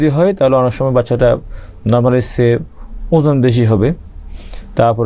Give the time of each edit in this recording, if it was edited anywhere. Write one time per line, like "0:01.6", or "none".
none